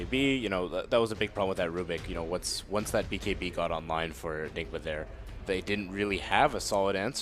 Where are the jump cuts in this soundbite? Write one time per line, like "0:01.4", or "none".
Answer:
0:04.1